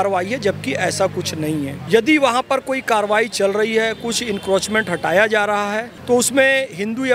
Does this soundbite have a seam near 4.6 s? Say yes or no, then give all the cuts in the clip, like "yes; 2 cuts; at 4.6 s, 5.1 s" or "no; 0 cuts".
no; 2 cuts; at 1.8 s, 5.9 s